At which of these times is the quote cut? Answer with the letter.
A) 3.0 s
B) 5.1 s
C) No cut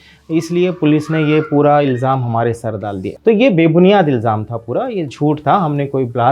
A